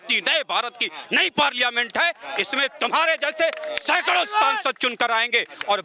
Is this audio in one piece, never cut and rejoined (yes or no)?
yes